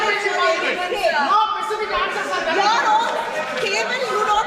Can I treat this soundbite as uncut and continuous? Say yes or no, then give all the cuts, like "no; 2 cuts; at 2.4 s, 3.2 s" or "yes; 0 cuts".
yes; 0 cuts